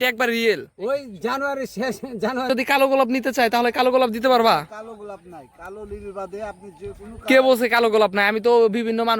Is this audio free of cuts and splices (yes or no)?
no